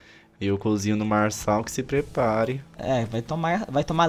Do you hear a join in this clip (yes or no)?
no